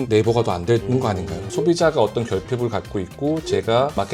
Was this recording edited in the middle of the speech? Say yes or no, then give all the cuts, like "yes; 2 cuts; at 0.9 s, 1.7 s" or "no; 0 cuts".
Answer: yes; 1 cut; at 1.5 s